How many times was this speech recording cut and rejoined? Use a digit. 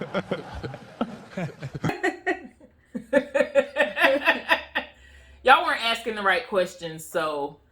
1